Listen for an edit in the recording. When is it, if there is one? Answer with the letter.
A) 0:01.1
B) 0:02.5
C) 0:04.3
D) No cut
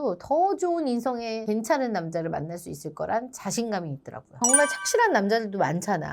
C